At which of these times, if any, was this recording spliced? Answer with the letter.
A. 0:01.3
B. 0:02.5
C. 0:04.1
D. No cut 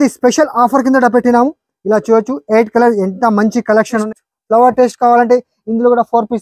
C